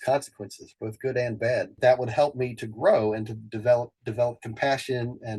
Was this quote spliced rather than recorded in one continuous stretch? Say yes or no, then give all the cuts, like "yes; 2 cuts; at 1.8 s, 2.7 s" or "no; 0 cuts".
yes; 1 cut; at 1.8 s